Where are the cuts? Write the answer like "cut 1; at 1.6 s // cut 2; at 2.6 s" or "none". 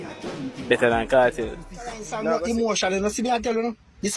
cut 1; at 2.1 s